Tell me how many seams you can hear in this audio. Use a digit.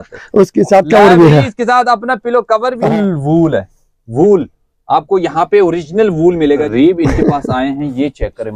2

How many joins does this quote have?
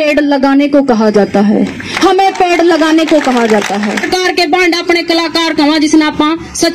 1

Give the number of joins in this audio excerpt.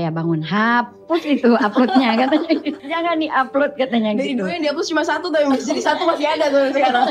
1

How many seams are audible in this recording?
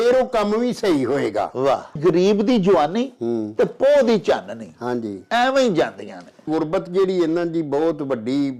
2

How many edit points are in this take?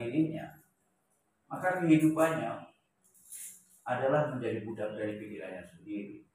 0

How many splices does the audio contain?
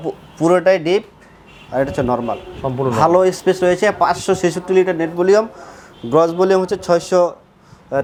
0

